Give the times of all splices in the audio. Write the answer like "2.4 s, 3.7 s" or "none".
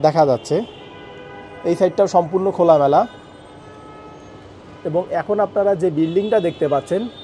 none